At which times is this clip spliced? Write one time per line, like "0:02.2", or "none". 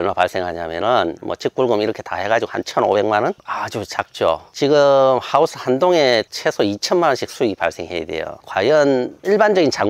0:08.4